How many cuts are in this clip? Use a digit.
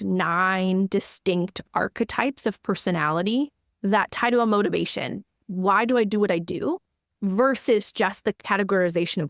2